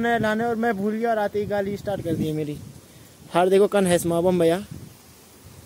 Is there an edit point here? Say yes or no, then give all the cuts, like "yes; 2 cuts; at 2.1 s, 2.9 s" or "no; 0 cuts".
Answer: no; 0 cuts